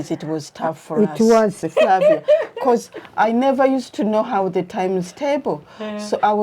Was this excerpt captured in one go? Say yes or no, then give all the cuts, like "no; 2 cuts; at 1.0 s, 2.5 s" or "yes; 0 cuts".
no; 1 cut; at 1.6 s